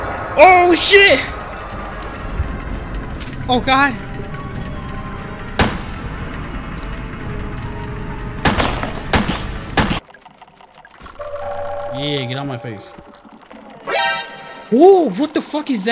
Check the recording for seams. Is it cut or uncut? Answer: cut